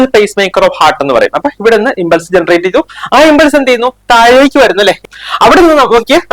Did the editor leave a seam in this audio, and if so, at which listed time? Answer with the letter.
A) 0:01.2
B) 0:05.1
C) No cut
B